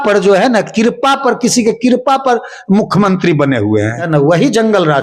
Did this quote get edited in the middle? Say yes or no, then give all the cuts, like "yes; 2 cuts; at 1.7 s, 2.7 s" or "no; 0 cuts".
yes; 1 cut; at 4.0 s